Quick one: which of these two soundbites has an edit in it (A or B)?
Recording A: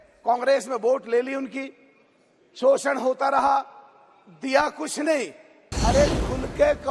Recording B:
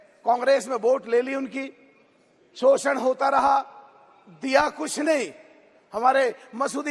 A